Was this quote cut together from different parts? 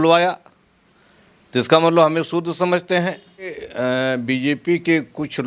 yes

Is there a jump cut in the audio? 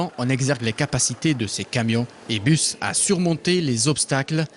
no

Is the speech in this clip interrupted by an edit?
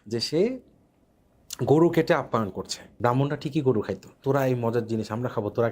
yes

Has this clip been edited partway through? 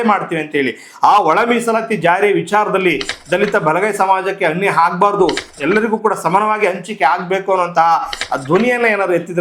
no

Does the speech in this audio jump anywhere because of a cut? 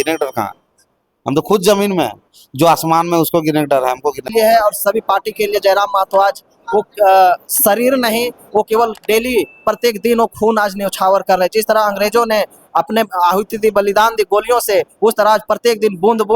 yes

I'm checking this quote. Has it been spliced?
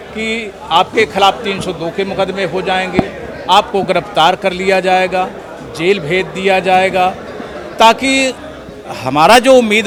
no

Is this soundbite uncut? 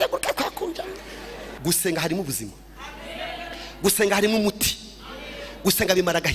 no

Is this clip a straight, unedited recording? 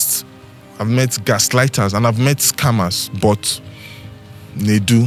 yes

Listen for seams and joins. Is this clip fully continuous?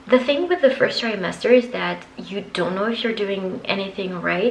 yes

